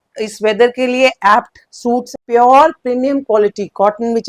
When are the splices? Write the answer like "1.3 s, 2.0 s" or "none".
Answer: 2.1 s